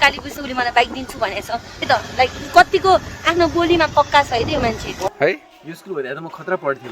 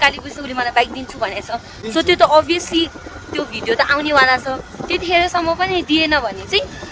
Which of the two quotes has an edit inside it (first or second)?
first